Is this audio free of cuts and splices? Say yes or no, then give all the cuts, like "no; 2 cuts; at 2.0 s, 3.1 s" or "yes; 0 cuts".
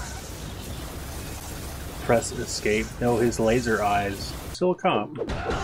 no; 1 cut; at 4.5 s